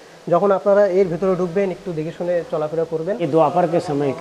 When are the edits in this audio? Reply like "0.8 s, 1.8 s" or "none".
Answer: 3.2 s

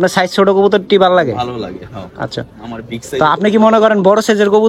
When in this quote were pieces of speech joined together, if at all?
none

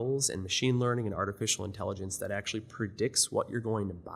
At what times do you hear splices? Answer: none

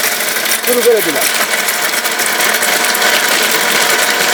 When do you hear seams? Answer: none

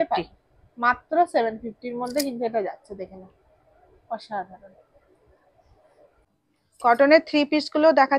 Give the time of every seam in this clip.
none

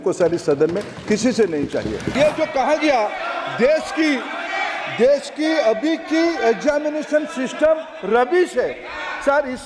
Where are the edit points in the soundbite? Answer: 2.1 s

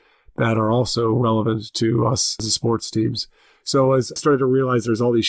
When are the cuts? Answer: 2.4 s, 4.2 s

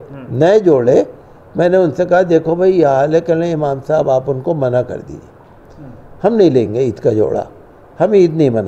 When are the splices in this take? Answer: none

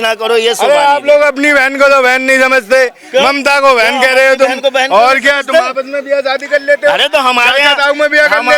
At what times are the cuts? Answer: none

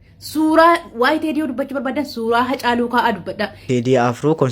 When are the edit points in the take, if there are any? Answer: 3.6 s

